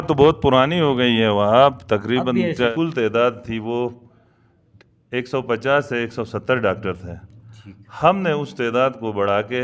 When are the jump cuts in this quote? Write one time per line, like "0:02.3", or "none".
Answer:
0:02.7

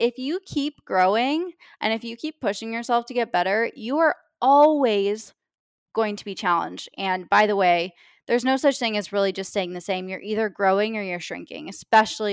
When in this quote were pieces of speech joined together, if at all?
none

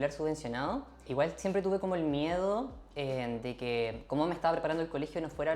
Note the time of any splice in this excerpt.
0:01.1

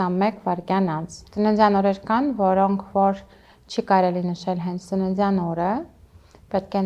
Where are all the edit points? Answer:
0:01.2

